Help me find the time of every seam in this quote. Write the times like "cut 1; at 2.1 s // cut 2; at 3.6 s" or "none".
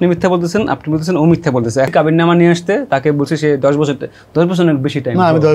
cut 1; at 1.9 s